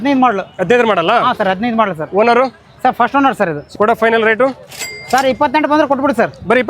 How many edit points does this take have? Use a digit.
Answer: 1